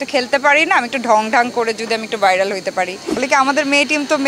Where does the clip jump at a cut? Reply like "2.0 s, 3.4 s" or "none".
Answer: 3.2 s